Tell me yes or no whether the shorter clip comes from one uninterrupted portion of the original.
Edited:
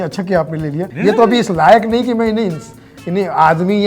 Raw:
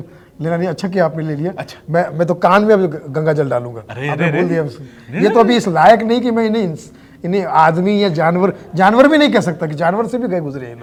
no